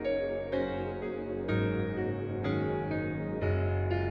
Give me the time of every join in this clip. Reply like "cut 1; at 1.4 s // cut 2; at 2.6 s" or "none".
none